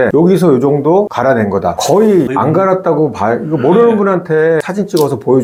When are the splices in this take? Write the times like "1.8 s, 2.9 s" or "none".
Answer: none